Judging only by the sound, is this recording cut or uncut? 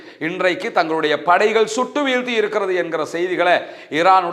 uncut